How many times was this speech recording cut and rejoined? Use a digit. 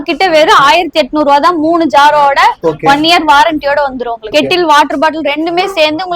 1